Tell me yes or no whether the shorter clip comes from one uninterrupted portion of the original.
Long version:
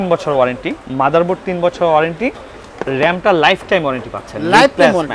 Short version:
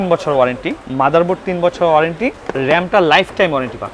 no